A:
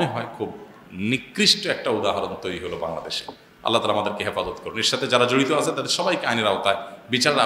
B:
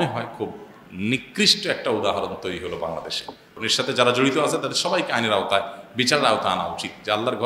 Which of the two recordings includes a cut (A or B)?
B